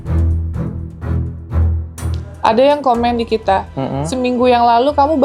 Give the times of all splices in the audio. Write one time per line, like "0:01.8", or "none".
0:02.3